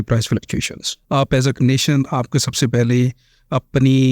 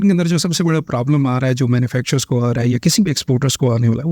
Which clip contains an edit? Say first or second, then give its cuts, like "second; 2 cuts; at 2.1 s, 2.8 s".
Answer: first; 1 cut; at 0.9 s